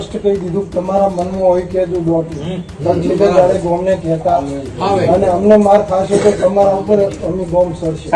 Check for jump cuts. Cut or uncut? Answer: uncut